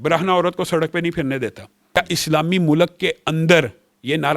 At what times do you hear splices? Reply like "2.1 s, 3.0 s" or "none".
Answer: 2.0 s